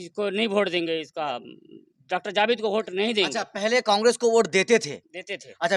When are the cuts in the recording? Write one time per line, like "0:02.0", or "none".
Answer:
none